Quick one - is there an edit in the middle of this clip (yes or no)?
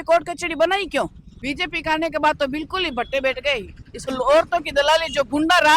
yes